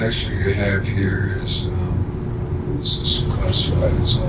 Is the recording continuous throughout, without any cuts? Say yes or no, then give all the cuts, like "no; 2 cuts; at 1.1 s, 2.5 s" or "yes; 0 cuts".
no; 1 cut; at 2.7 s